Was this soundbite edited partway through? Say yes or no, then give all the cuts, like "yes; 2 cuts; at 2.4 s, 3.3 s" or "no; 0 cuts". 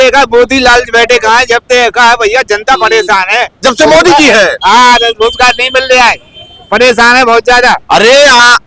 no; 0 cuts